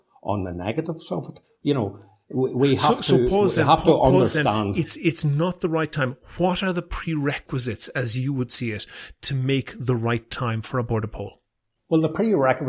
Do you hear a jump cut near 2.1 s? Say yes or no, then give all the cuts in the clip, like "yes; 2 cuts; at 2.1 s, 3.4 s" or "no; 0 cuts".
no; 0 cuts